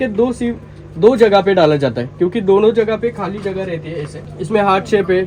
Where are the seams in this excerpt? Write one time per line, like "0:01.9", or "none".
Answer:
0:04.2